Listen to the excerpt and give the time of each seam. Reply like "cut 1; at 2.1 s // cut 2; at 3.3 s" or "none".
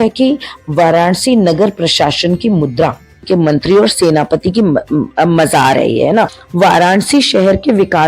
cut 1; at 3.2 s // cut 2; at 6.4 s